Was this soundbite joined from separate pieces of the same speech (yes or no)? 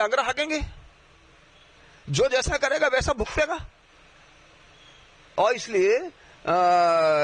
no